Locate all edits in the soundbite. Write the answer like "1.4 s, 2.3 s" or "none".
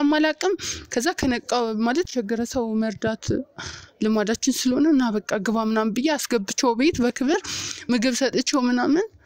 2.1 s